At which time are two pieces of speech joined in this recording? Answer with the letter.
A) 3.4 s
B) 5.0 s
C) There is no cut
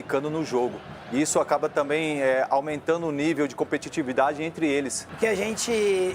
B